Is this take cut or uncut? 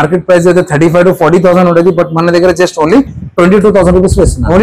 uncut